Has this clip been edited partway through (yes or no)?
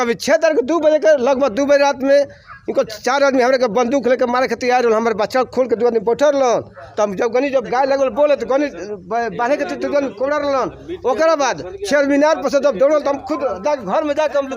no